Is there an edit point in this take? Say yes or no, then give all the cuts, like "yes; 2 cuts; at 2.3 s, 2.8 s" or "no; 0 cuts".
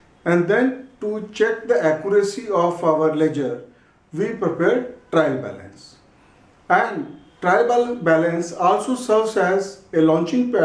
yes; 1 cut; at 7.2 s